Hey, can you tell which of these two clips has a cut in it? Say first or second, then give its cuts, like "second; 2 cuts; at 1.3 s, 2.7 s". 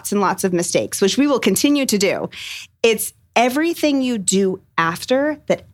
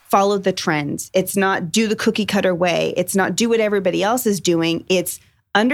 first; 1 cut; at 2.5 s